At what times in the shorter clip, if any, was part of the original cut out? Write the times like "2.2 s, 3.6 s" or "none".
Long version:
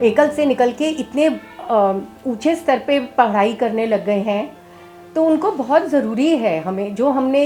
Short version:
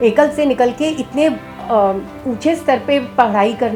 none